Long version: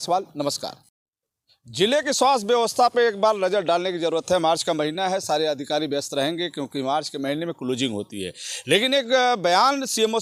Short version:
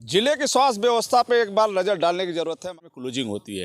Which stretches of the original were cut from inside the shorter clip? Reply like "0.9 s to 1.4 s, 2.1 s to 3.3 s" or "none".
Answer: 4.3 s to 7.3 s